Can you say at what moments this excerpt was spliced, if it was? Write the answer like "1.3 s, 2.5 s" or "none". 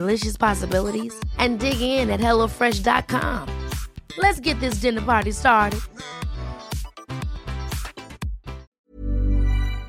8.7 s